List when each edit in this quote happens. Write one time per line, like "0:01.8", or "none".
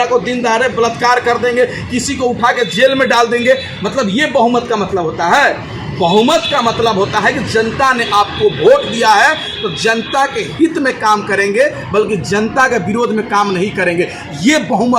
none